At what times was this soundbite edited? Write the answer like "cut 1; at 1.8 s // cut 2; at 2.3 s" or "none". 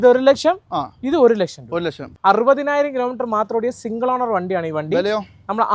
cut 1; at 2.1 s

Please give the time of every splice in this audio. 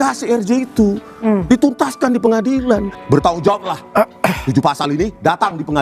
cut 1; at 2.9 s

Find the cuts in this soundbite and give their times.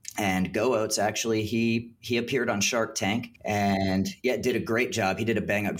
cut 1; at 3.5 s

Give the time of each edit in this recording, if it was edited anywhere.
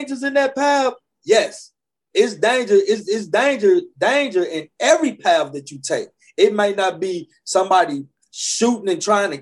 none

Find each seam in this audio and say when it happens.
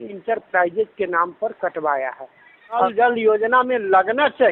cut 1; at 2.9 s

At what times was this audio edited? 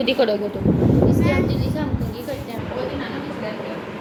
none

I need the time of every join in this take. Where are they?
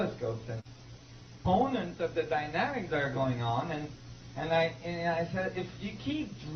none

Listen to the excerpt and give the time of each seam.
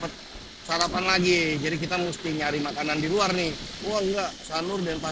cut 1; at 3.7 s

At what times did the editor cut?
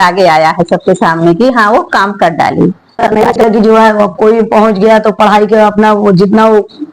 cut 1; at 3.4 s

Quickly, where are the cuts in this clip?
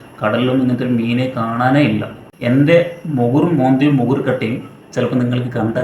cut 1; at 2.3 s

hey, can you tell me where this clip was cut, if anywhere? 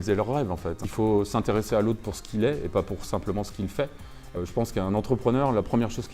cut 1; at 0.8 s // cut 2; at 4.3 s

